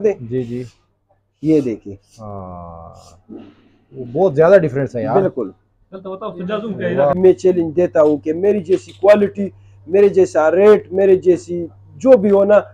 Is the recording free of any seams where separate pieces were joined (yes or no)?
no